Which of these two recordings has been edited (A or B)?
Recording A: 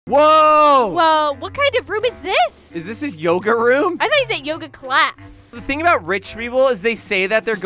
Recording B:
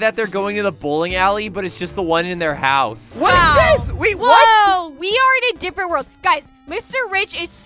B